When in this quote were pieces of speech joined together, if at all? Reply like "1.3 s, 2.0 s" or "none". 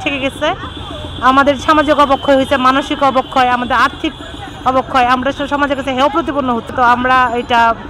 6.7 s